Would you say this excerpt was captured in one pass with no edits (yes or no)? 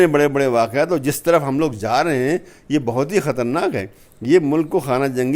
yes